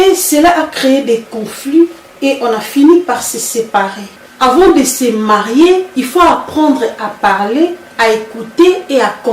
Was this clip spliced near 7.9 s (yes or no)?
no